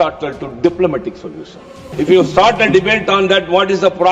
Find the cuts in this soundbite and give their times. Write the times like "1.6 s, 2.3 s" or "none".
1.9 s